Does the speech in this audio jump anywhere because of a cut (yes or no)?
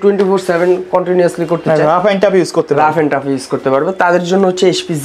no